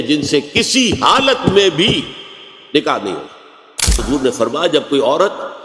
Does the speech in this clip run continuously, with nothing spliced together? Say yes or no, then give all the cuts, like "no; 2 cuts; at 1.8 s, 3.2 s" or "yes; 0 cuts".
no; 1 cut; at 4.0 s